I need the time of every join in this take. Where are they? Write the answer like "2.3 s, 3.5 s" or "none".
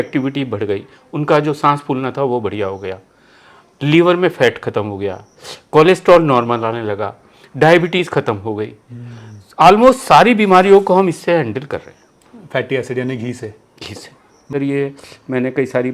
14.5 s